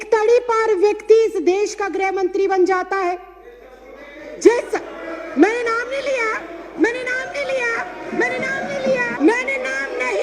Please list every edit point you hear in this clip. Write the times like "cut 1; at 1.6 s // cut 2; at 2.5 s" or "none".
cut 1; at 9.1 s